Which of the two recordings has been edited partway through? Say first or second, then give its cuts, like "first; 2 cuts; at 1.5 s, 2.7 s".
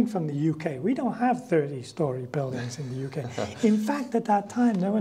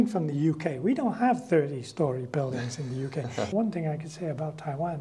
second; 1 cut; at 3.5 s